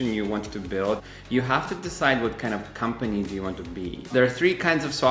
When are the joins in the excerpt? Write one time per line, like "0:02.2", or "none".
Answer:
0:01.0
0:04.1